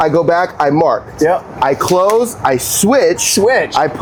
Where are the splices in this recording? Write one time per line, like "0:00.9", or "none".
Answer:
none